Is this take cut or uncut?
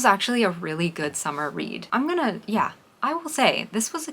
cut